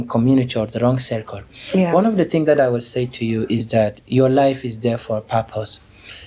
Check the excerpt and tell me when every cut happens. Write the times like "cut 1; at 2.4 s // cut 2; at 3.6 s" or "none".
none

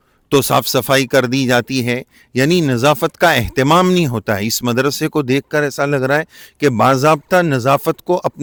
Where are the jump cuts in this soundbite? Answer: none

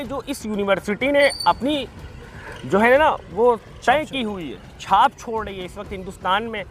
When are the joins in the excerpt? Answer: none

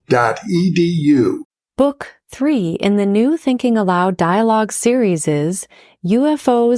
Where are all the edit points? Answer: cut 1; at 1.5 s

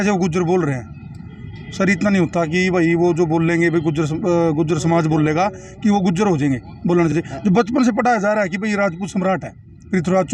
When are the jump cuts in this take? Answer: none

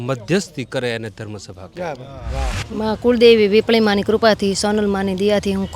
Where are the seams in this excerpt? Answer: cut 1; at 2.6 s

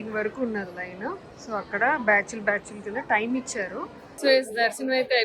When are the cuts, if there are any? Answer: cut 1; at 4.0 s

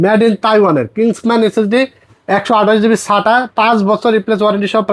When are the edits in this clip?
none

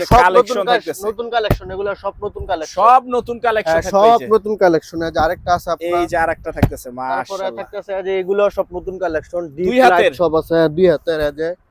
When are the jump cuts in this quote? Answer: none

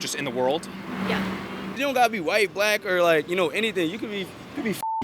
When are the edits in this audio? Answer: cut 1; at 1.7 s

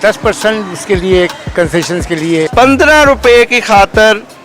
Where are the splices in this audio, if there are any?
cut 1; at 2.5 s

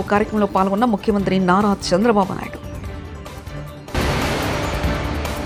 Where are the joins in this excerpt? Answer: none

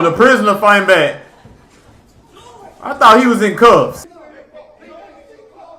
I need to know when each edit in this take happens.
cut 1; at 4.0 s

